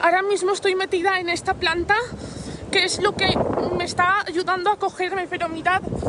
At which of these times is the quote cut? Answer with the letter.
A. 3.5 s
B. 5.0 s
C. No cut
C